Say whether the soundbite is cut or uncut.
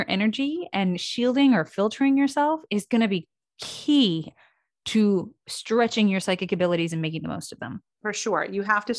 cut